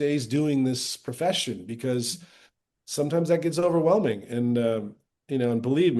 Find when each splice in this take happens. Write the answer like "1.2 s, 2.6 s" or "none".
none